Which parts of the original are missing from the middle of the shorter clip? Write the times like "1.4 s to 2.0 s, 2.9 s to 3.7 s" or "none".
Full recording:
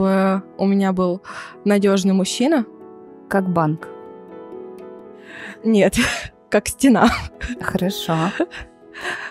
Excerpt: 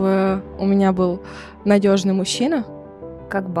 none